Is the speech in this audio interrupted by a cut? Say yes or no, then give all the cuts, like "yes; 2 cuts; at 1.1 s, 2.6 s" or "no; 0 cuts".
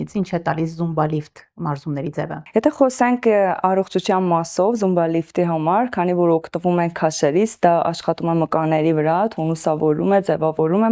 no; 0 cuts